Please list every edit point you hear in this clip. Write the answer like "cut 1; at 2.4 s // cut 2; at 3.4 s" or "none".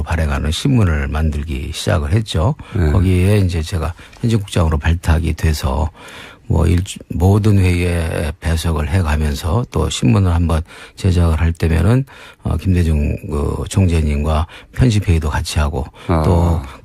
cut 1; at 7.4 s